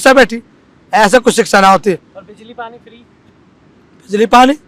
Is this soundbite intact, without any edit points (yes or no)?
yes